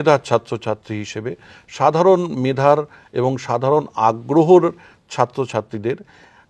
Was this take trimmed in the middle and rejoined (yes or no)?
no